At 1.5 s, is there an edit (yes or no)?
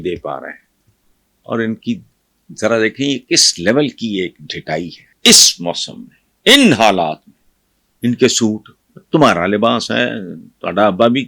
no